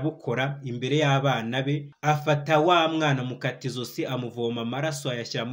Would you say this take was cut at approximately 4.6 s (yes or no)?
no